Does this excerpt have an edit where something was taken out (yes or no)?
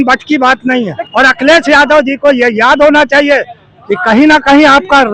yes